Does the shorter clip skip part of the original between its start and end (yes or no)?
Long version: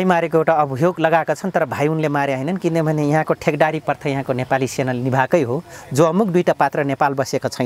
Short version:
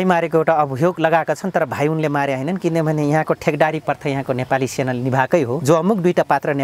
yes